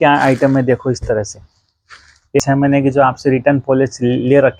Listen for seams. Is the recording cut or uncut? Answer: cut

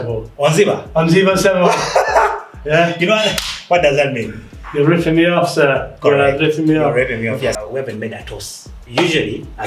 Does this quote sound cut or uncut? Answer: cut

